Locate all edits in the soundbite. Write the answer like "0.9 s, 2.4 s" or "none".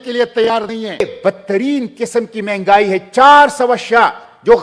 none